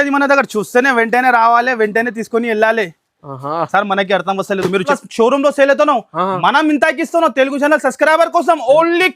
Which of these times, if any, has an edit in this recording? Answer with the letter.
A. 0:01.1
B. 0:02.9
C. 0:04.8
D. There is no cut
C